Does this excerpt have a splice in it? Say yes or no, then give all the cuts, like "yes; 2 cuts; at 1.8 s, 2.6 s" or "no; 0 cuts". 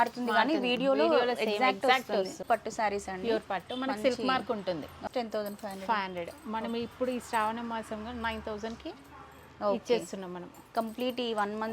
yes; 2 cuts; at 2.4 s, 5.0 s